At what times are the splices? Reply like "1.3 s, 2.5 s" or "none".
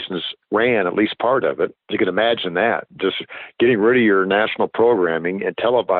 1.8 s